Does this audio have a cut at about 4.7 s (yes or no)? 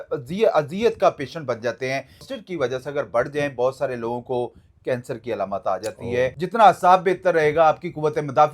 no